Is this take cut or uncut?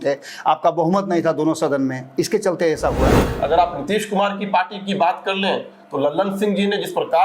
cut